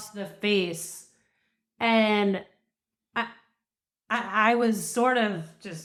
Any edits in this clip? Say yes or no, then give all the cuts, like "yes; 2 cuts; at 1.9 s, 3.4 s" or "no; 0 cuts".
no; 0 cuts